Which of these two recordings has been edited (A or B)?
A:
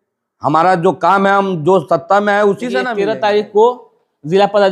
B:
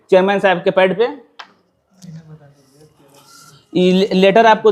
A